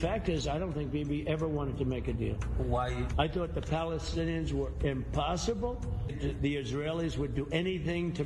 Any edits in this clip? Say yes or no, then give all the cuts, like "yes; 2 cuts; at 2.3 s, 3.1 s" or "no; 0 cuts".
yes; 1 cut; at 6.2 s